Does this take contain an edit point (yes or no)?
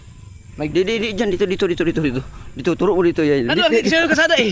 no